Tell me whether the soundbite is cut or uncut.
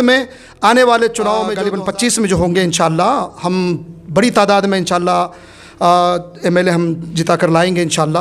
cut